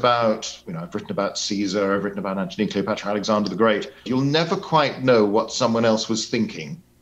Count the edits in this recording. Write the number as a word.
one